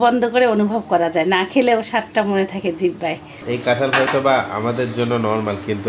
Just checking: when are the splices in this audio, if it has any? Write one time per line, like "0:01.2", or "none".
0:03.3

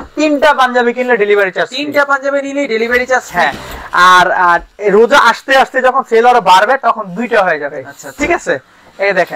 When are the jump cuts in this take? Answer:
none

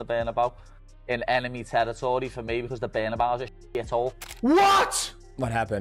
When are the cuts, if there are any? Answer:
0:04.2

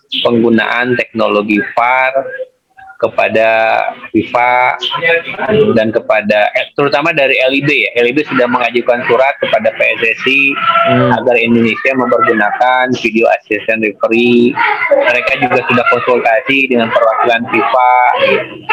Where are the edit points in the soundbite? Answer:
none

